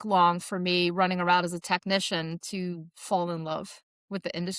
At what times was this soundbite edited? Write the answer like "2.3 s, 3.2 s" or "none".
none